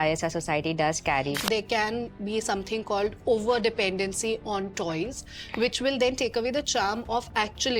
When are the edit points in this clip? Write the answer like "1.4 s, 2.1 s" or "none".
1.4 s